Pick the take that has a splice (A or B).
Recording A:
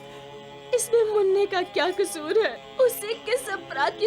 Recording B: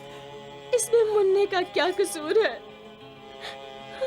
A